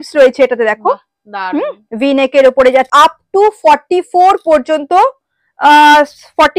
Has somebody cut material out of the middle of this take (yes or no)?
yes